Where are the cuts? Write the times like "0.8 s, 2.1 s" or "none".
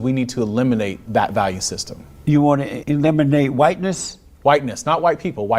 1.0 s, 2.7 s